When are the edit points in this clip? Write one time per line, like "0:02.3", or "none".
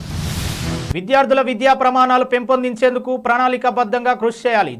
0:00.9